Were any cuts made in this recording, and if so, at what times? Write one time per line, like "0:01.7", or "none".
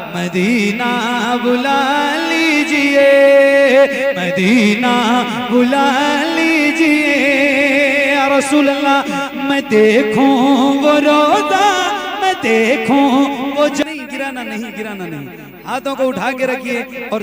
0:13.8